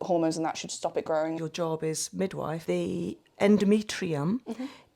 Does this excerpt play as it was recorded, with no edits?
no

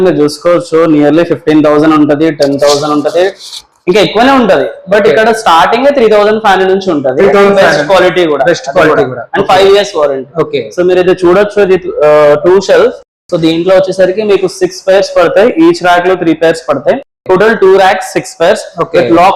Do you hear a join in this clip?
no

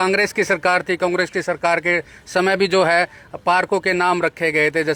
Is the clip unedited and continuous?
yes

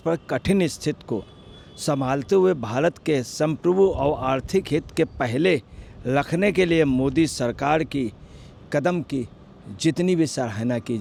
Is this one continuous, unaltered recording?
yes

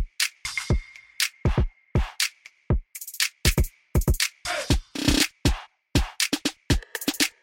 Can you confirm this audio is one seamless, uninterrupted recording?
yes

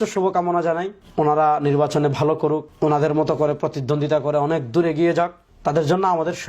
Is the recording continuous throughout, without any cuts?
no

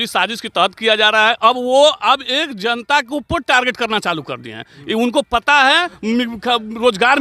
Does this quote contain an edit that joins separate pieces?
yes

